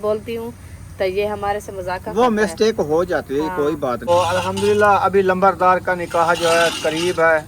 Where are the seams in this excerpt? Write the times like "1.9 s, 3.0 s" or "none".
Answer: 4.1 s